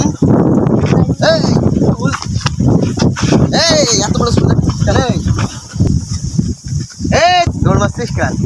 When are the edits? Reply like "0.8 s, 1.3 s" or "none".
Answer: 5.9 s, 7.5 s